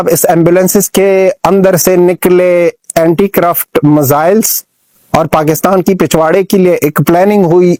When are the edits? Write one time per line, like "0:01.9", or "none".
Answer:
none

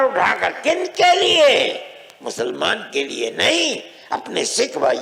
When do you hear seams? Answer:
none

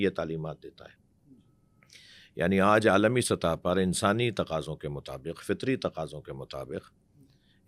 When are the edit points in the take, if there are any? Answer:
none

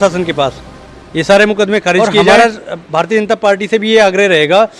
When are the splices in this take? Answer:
0:02.2

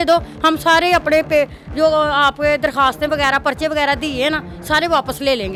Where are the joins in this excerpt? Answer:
none

